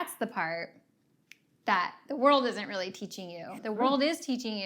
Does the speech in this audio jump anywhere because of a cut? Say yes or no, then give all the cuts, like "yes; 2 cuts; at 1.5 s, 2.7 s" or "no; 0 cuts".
yes; 1 cut; at 3.5 s